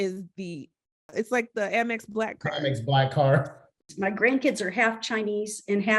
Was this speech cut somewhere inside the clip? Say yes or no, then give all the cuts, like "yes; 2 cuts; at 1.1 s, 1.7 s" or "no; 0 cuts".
yes; 2 cuts; at 1.1 s, 3.8 s